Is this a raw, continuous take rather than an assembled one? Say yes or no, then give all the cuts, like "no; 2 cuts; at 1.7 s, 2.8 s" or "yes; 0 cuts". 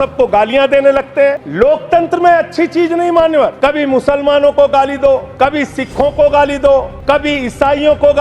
no; 4 cuts; at 1.5 s, 3.5 s, 5.3 s, 6.9 s